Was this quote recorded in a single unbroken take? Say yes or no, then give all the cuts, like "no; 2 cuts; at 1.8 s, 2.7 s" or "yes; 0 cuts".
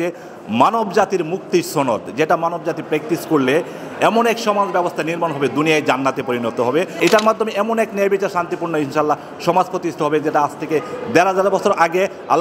no; 1 cut; at 7.0 s